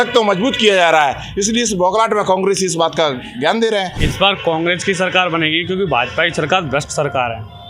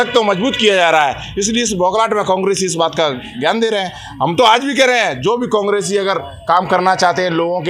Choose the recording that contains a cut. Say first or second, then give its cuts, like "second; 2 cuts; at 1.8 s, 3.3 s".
first; 1 cut; at 4.0 s